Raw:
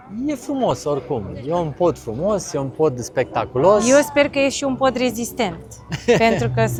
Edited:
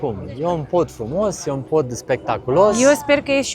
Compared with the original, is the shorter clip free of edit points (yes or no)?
yes